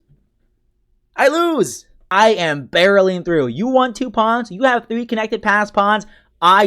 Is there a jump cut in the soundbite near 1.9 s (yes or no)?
yes